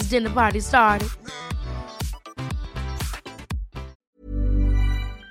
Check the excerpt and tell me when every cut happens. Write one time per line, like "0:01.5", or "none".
0:04.0